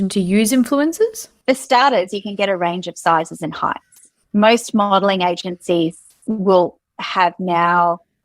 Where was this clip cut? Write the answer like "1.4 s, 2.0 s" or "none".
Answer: 1.3 s